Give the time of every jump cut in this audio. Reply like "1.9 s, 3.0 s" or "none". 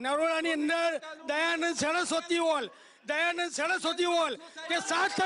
none

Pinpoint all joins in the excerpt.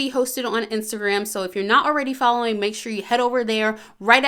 none

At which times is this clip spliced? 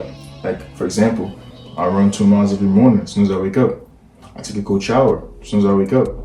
none

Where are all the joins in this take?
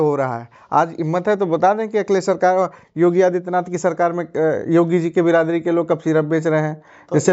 none

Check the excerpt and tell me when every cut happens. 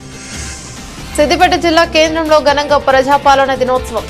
1.1 s

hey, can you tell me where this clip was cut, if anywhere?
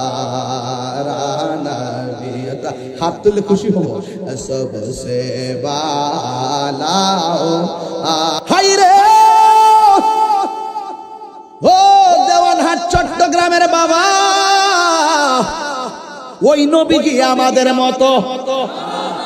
8.4 s

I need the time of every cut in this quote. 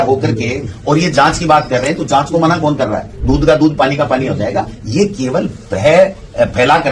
none

